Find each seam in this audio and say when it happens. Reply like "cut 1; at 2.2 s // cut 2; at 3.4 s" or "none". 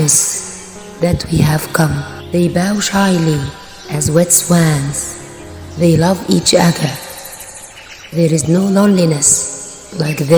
cut 1; at 2.1 s